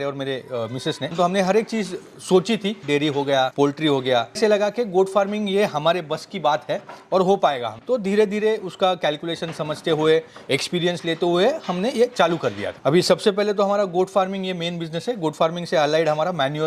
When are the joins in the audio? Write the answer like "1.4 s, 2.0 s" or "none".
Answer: 1.1 s, 2.8 s, 12.7 s